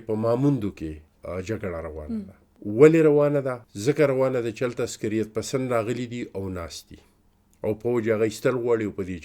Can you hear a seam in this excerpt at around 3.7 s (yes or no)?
yes